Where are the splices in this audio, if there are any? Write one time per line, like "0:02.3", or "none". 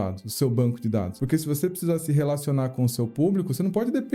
0:01.2